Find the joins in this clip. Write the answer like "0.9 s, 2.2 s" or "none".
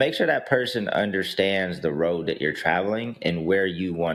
none